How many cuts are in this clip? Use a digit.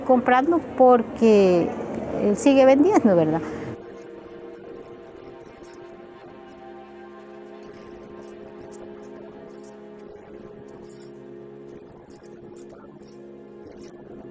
0